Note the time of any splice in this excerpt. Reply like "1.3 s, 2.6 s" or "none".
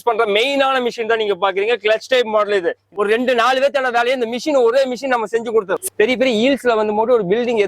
2.8 s, 5.8 s